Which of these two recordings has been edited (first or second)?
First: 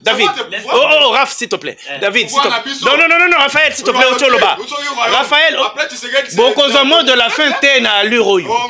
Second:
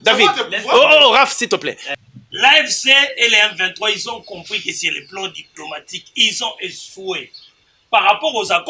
second